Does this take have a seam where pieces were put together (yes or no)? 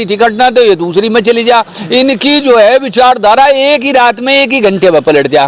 no